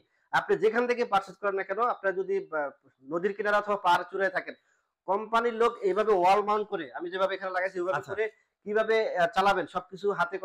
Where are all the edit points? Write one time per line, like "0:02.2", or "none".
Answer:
none